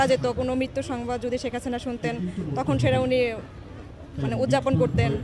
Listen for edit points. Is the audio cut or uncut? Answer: uncut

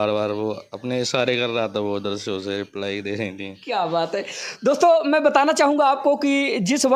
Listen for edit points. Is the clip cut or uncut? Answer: uncut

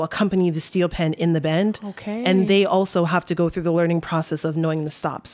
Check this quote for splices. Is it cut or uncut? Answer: uncut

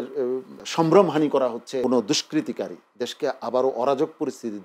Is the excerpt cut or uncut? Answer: cut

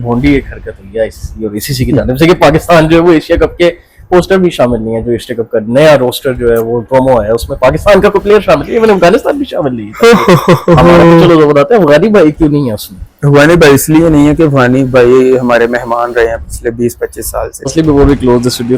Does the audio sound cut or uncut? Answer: cut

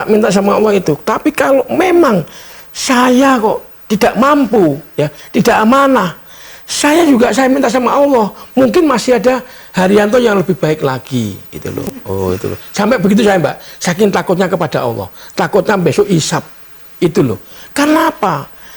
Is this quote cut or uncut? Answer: uncut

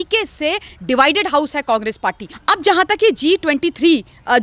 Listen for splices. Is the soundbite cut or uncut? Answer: cut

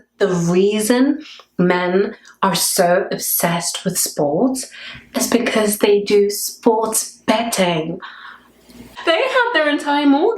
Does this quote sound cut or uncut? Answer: cut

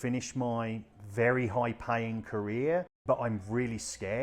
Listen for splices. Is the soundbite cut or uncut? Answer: cut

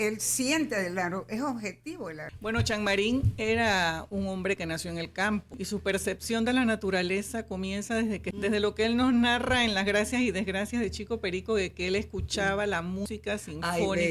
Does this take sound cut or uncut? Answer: cut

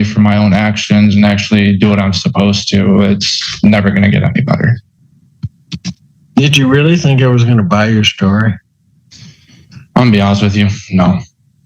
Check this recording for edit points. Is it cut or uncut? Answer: uncut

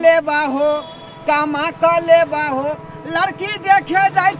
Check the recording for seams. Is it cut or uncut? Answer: uncut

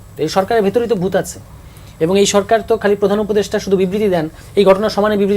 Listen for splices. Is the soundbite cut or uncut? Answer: uncut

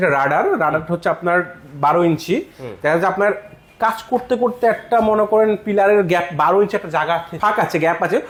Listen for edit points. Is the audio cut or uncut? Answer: uncut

